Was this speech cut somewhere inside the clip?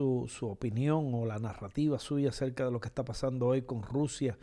no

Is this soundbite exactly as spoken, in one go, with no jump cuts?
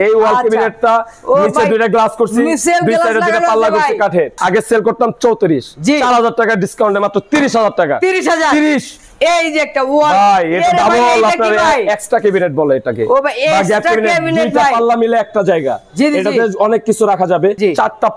yes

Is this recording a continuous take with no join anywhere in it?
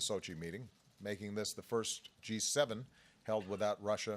no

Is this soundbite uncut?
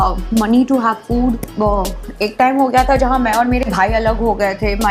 no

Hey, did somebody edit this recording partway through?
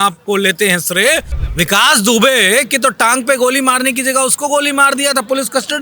yes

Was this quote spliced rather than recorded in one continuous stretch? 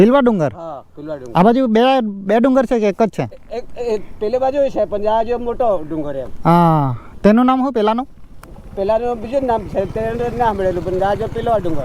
no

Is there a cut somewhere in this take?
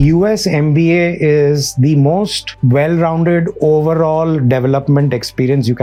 no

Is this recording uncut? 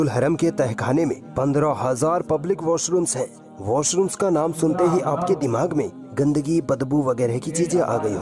yes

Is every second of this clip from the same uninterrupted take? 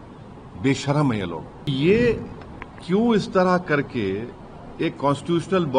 no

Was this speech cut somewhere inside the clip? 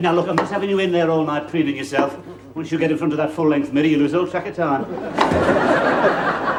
no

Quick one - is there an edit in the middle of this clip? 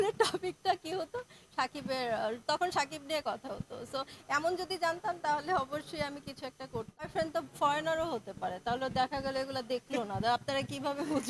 yes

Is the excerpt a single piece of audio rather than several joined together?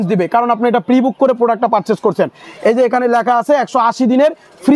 yes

